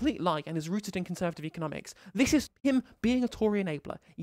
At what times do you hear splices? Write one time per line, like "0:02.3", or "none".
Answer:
0:02.5